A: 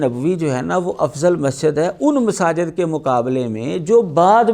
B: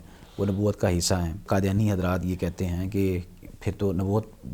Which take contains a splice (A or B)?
B